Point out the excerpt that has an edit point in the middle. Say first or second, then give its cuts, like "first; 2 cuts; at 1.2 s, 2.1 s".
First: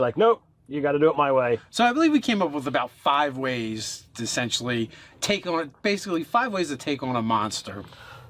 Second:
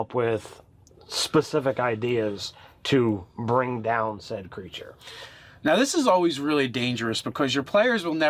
first; 1 cut; at 5.6 s